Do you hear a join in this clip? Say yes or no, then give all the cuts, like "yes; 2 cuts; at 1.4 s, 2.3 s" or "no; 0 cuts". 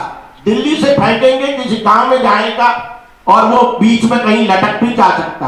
no; 0 cuts